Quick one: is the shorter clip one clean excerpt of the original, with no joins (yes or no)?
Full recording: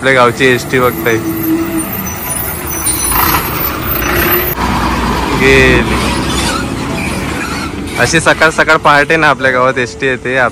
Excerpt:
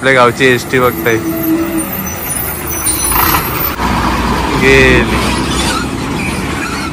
no